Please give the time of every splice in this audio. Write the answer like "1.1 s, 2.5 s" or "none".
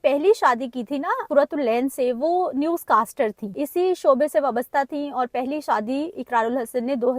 1.2 s, 3.6 s